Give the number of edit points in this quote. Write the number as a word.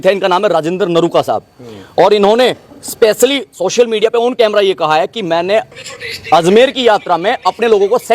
zero